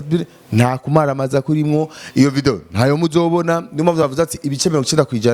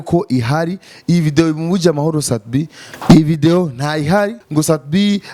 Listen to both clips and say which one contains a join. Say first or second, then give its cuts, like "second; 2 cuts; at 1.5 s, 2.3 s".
second; 2 cuts; at 2.8 s, 4.4 s